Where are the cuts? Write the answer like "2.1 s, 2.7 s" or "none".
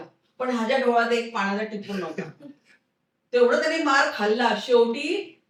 none